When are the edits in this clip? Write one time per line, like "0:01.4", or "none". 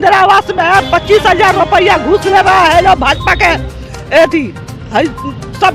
none

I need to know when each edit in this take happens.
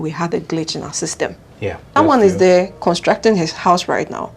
0:01.9

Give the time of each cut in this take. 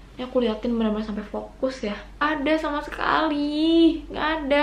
0:02.2

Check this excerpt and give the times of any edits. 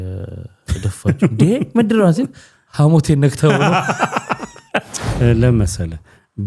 0:05.0

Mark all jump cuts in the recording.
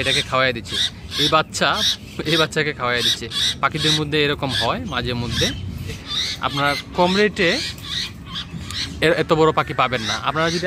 0:06.0

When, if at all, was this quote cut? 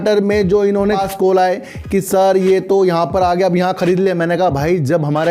0:01.0

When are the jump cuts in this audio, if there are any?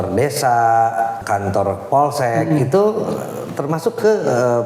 0:01.2

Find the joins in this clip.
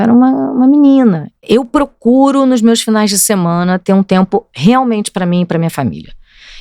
0:01.4

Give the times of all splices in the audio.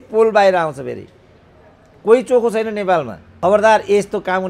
0:03.2

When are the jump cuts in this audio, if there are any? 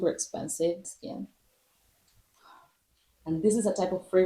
0:00.9
0:03.1

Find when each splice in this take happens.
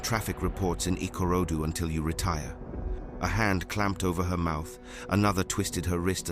0:03.0

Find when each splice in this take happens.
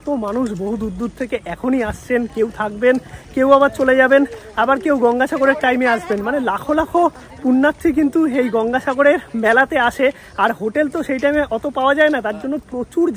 none

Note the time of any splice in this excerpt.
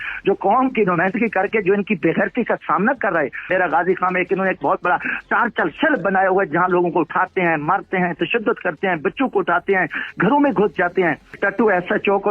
0:03.5
0:11.4

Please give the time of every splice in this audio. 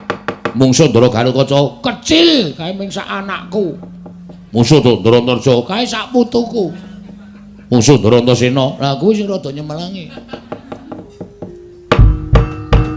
0:11.1

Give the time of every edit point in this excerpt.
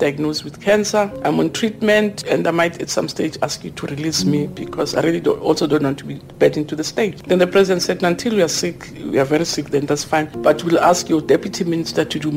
0:01.1
0:02.2
0:07.2
0:10.3

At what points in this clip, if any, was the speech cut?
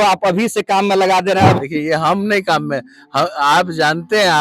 0:01.6

